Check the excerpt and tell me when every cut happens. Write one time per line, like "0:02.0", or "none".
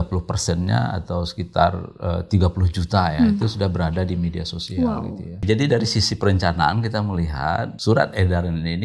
0:05.4
0:07.7